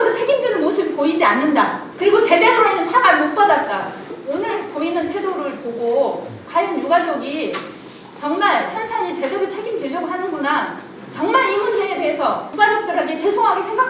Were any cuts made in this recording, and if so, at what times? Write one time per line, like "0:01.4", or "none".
0:01.8
0:04.2
0:12.5